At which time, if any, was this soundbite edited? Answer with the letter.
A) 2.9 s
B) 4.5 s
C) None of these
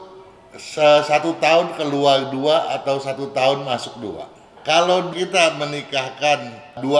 B